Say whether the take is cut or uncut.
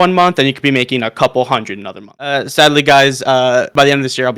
cut